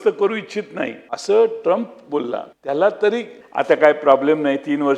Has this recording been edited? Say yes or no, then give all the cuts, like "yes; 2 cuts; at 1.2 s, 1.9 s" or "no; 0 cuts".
yes; 3 cuts; at 1.1 s, 2.5 s, 3.4 s